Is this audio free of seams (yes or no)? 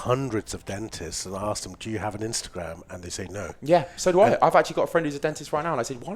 yes